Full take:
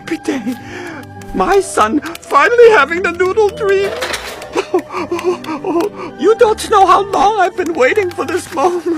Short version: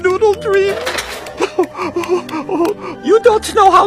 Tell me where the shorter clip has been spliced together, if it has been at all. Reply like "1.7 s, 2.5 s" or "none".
none